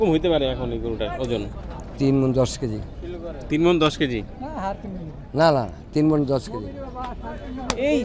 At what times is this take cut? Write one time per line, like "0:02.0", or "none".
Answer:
none

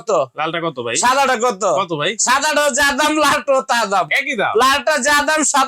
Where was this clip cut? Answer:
none

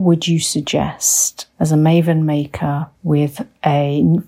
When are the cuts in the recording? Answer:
0:01.4

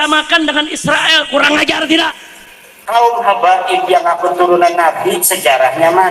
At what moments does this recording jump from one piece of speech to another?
0:02.9

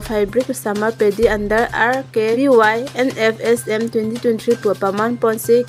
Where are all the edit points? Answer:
0:02.4

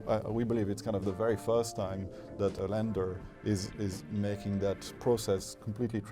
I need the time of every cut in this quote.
0:02.6

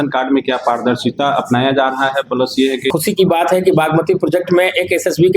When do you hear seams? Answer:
0:02.9

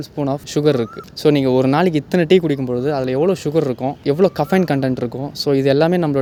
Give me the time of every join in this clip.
none

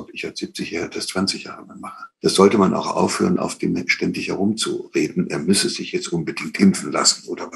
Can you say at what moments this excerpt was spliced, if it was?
0:02.1

